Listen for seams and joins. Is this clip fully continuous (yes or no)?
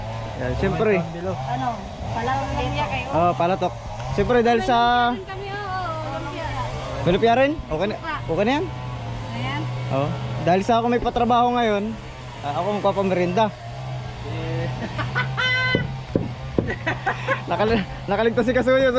yes